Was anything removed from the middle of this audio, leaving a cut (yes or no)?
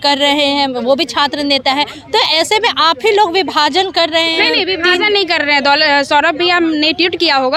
no